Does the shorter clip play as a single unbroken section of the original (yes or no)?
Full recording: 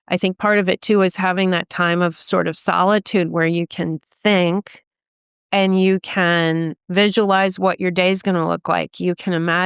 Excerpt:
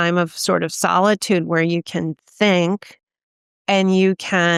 yes